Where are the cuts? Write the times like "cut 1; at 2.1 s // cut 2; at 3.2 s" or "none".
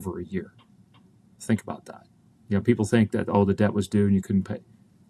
none